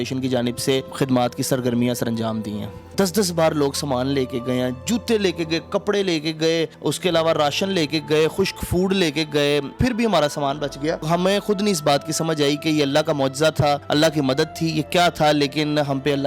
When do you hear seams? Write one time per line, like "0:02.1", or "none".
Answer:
0:00.9
0:02.9
0:06.7
0:09.7
0:11.0
0:13.8